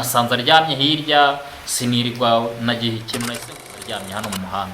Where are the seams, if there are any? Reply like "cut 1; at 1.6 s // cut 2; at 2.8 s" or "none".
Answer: cut 1; at 3.4 s